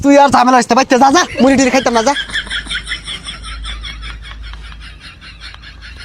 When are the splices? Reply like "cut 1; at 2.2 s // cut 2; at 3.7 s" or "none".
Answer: none